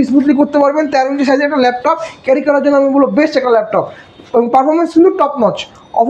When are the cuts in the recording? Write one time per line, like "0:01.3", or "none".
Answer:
none